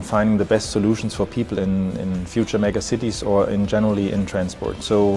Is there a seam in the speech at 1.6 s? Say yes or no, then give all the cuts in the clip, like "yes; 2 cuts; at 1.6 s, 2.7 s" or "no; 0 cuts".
no; 0 cuts